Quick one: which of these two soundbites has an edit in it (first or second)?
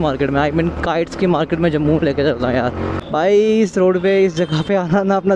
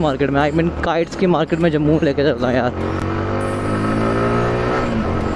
first